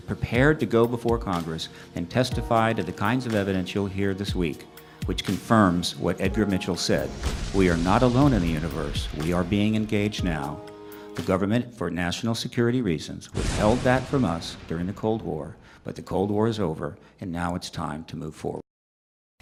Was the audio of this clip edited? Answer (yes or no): no